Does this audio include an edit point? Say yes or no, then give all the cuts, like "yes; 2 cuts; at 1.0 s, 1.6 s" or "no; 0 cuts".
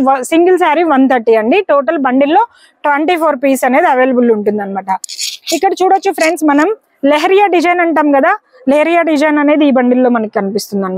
no; 0 cuts